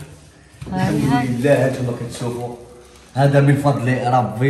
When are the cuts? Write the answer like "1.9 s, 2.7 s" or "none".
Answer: none